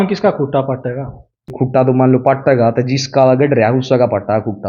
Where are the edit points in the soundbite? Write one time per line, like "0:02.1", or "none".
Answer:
0:01.5